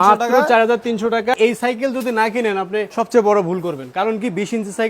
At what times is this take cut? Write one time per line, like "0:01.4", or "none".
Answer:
0:01.3
0:02.9